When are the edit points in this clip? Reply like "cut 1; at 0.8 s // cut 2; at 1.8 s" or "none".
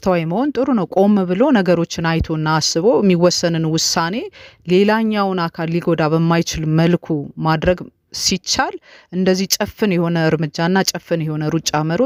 none

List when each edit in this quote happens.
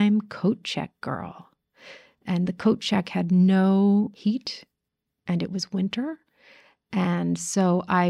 cut 1; at 4.1 s

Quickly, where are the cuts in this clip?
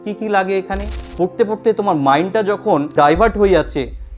cut 1; at 1.0 s // cut 2; at 2.9 s

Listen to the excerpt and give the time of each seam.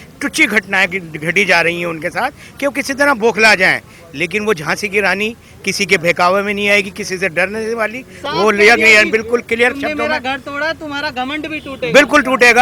none

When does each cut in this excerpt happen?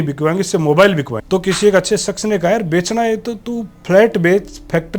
cut 1; at 1.2 s

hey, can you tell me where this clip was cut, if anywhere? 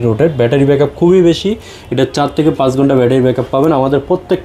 none

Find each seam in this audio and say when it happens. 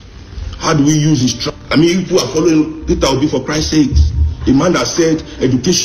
cut 1; at 1.4 s

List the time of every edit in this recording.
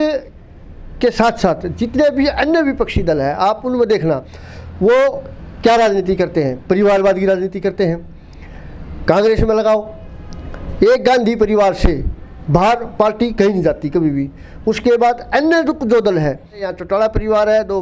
cut 1; at 16.6 s

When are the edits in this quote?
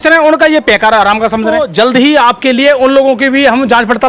cut 1; at 1.6 s

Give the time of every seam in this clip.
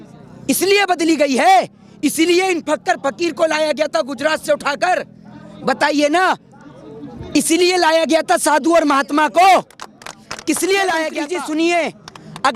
cut 1; at 11.2 s

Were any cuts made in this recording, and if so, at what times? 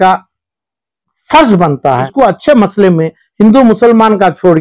cut 1; at 2.1 s

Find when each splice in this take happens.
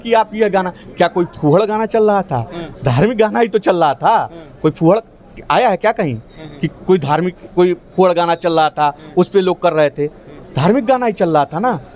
none

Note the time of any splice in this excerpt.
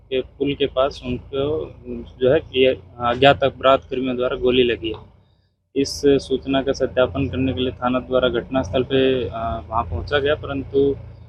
none

